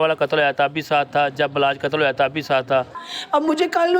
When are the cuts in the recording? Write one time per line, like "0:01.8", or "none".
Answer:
0:03.0

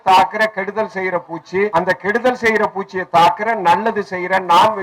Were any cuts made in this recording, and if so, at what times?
0:01.7

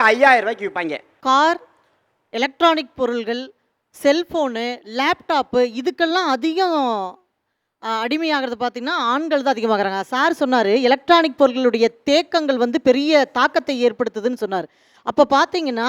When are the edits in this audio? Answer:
none

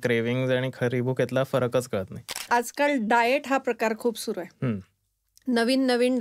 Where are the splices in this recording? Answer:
0:02.5

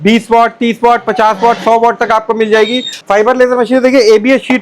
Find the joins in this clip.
0:02.9

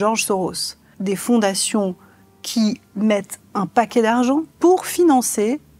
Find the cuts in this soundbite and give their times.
0:00.9
0:04.5

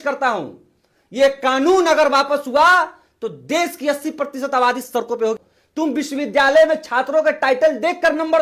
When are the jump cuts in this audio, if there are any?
0:05.4

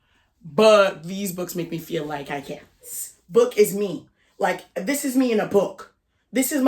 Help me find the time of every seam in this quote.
0:02.9

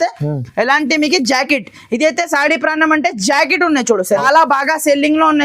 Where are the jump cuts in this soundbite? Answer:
0:04.2

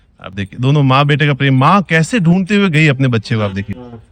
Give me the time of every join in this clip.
none

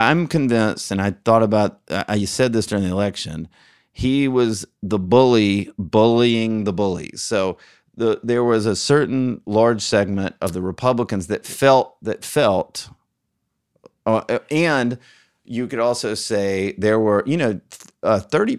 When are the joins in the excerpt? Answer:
none

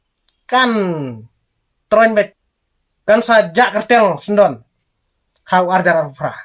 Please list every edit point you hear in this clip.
0:02.3

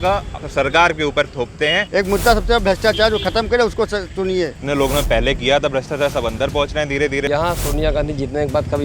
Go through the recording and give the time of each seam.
0:01.8
0:04.6
0:07.2

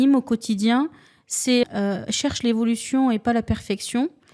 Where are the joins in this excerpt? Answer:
0:01.6

